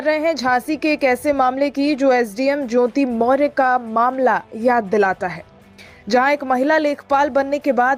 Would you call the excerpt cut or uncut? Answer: uncut